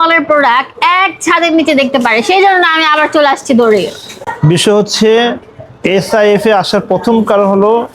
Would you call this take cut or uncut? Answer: uncut